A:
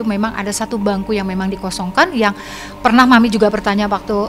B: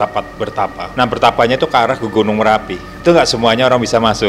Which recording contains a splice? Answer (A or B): B